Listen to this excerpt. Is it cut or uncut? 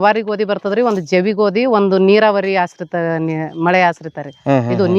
uncut